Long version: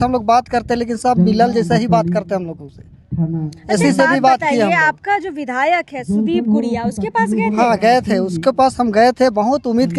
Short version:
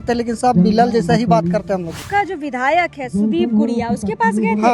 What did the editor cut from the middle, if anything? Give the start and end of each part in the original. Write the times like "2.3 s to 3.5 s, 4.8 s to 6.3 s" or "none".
2.7 s to 5.0 s